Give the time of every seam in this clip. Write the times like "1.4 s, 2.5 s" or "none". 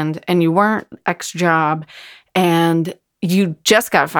none